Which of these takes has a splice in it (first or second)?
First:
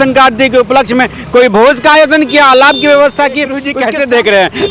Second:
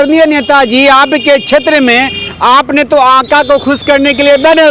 first